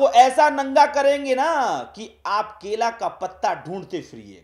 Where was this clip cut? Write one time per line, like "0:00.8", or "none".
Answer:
none